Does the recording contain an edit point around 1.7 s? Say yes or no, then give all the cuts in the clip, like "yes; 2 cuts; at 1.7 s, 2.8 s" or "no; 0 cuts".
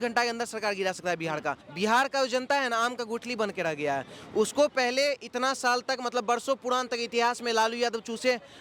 yes; 1 cut; at 1.7 s